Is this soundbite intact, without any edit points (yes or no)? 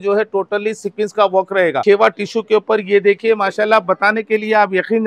no